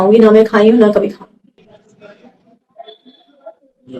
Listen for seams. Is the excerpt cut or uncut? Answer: cut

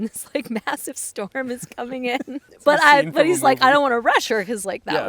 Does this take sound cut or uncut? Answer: cut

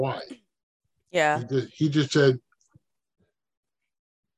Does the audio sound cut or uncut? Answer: uncut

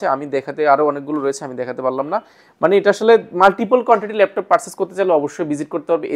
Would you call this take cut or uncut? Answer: uncut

